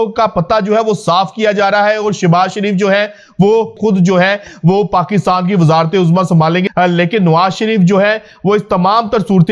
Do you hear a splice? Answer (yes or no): yes